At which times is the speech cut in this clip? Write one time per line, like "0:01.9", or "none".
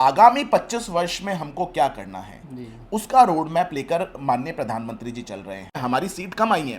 0:05.8